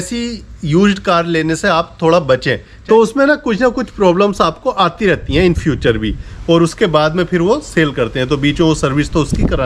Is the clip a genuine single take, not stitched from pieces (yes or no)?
no